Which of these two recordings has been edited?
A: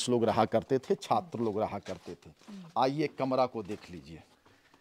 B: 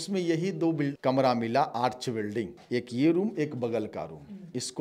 B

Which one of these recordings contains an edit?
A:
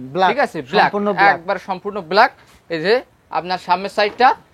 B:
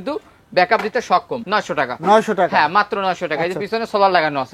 B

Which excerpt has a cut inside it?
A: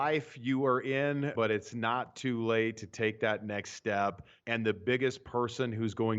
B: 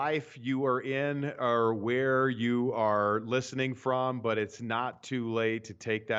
A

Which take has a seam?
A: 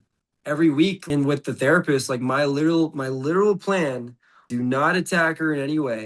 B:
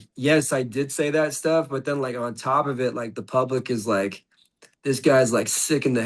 A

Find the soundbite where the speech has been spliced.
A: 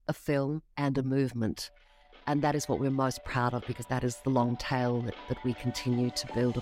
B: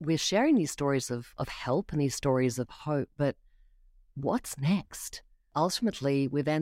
B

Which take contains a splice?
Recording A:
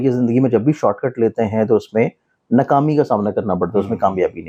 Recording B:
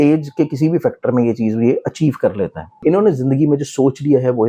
B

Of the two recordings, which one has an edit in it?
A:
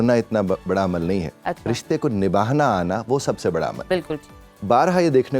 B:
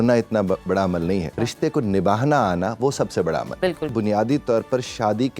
B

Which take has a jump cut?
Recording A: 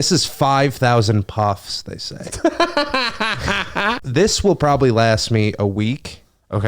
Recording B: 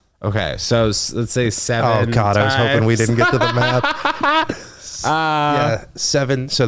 A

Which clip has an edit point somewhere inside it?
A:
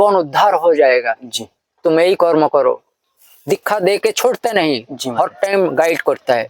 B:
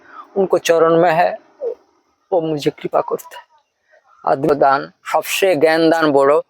B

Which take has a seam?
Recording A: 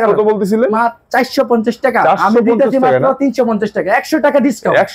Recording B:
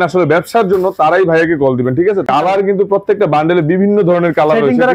B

